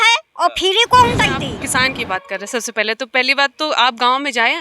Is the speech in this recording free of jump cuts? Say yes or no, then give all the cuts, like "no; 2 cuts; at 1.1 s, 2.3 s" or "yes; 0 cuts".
no; 1 cut; at 1.5 s